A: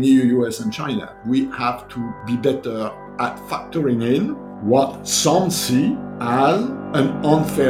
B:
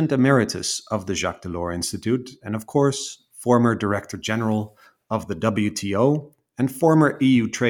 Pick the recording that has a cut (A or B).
A